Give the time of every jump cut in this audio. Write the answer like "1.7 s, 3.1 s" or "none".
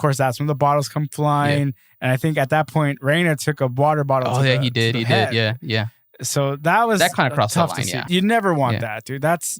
8.0 s